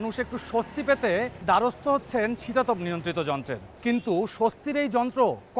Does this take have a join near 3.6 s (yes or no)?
yes